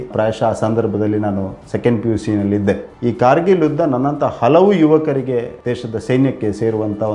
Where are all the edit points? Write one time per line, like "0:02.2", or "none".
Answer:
0:05.5